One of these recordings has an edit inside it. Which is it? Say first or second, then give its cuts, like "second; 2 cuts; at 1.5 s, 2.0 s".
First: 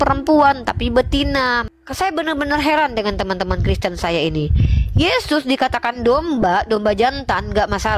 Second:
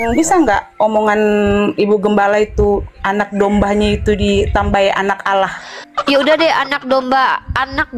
first; 1 cut; at 1.6 s